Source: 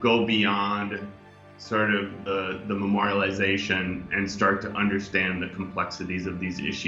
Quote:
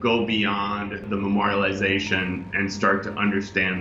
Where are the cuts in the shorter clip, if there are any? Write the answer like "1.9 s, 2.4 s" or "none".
1.0 s